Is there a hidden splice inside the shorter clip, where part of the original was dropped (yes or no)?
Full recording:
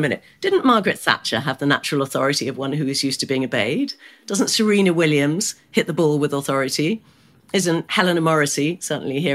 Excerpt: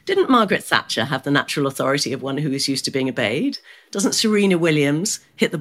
no